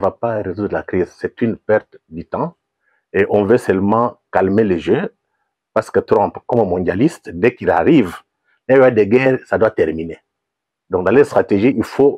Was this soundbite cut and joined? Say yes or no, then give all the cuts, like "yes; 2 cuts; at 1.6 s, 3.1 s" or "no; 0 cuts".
no; 0 cuts